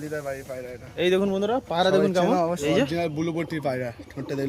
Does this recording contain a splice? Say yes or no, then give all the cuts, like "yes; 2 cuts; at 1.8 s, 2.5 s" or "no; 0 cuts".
yes; 1 cut; at 2.6 s